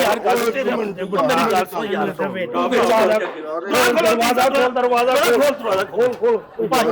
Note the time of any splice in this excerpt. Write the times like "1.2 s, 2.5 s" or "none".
none